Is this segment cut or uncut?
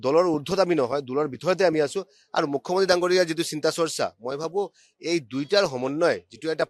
uncut